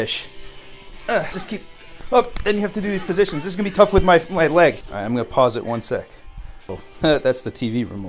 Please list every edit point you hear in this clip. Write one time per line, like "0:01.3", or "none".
0:01.4
0:04.9
0:06.9